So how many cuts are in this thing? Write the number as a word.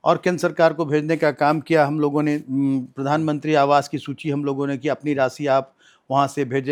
zero